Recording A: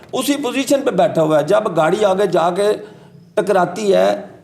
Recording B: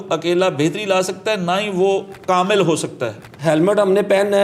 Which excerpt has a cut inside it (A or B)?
B